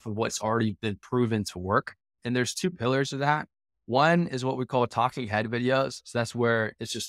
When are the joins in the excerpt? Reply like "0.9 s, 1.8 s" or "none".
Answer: 2.2 s